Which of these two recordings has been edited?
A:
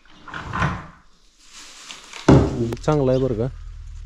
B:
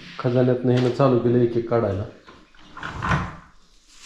A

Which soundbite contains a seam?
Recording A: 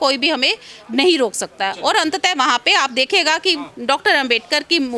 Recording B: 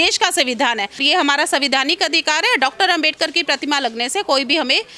B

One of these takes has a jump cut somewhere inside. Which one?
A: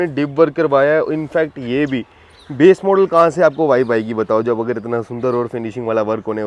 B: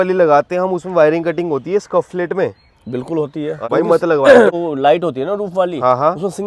B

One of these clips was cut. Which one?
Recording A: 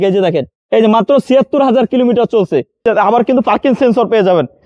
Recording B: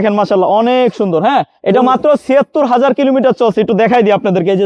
A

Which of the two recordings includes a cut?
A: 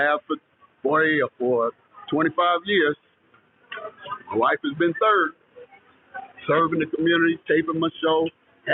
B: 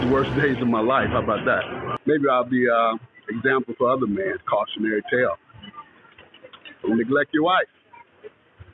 B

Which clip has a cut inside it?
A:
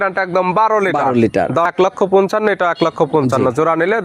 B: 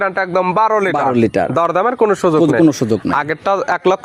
A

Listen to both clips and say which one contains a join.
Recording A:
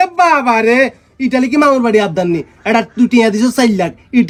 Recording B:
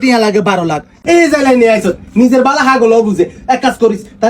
B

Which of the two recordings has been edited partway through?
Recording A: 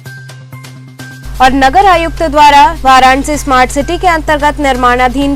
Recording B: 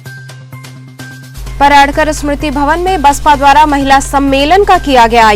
B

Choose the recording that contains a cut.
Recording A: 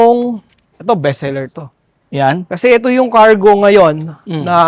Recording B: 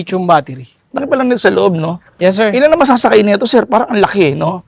B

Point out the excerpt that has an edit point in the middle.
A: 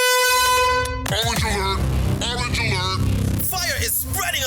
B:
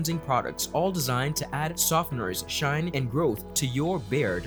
A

